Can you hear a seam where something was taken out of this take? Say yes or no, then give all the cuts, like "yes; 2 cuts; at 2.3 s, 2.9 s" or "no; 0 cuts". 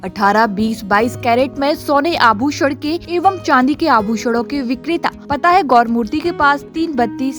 yes; 2 cuts; at 3.0 s, 5.2 s